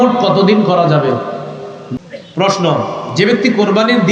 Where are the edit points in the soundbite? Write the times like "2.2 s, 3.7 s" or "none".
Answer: 2.0 s

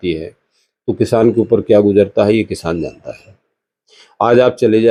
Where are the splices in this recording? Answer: none

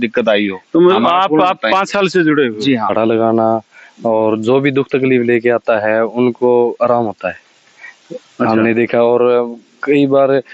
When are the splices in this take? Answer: 2.9 s

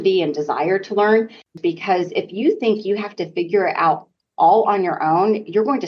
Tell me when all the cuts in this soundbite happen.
1.5 s

